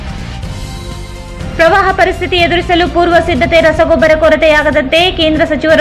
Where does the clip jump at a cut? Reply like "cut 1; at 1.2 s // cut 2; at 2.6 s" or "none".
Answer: cut 1; at 1.2 s